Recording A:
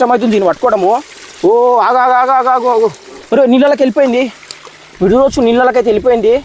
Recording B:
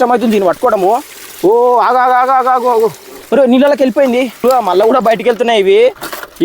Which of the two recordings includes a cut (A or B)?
B